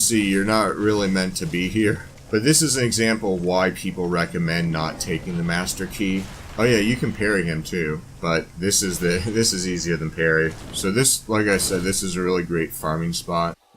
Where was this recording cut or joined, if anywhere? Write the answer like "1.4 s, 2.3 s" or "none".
2.1 s, 6.4 s, 8.1 s, 10.7 s